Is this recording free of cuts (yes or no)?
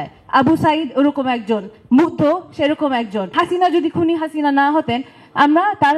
no